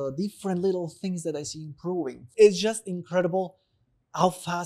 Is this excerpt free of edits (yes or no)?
no